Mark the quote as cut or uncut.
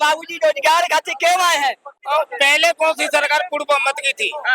cut